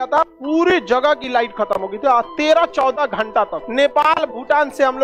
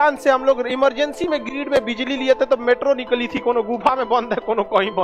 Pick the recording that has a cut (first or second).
first